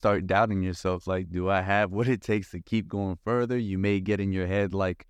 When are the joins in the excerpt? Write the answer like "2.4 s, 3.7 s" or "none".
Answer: none